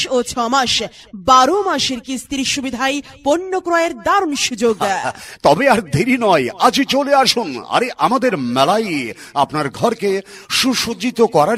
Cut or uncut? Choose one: uncut